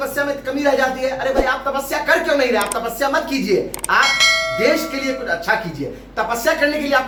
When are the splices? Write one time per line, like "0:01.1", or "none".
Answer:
none